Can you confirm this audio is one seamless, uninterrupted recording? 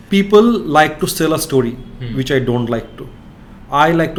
yes; 0 cuts

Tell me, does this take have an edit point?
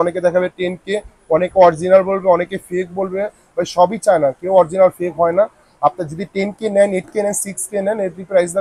no; 0 cuts

